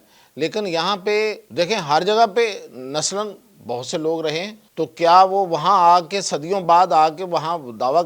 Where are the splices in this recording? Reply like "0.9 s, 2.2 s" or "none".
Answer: 1.4 s, 4.6 s